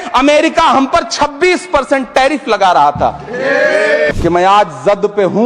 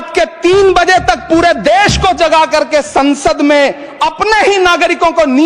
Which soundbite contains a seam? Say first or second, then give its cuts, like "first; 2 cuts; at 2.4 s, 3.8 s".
first; 1 cut; at 4.1 s